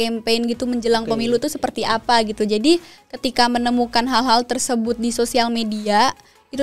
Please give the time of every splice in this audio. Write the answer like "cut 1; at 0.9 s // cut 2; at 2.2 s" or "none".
none